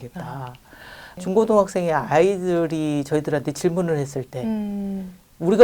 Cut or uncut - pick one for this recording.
cut